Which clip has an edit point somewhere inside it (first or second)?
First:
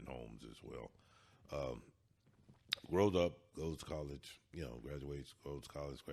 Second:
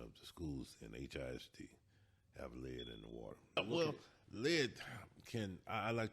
second